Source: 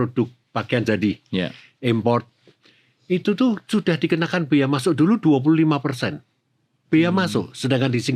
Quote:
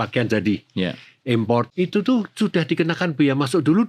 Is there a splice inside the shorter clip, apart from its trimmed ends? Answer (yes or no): yes